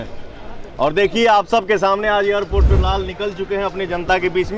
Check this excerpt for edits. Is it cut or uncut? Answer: cut